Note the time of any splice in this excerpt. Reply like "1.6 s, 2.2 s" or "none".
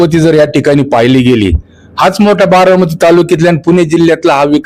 none